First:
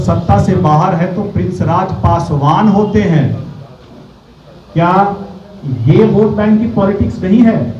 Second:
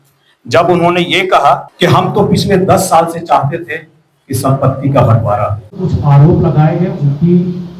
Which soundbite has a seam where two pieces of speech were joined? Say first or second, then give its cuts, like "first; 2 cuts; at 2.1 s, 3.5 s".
second; 1 cut; at 5.6 s